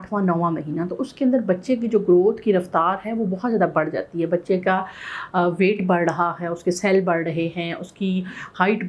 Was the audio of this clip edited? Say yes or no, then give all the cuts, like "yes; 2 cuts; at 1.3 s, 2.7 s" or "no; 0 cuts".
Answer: no; 0 cuts